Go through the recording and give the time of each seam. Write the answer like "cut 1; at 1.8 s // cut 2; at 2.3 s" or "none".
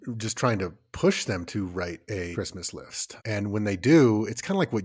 cut 1; at 2.8 s